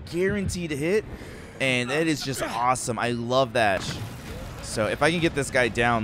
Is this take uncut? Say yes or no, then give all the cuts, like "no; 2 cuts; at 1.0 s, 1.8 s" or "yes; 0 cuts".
no; 1 cut; at 3.9 s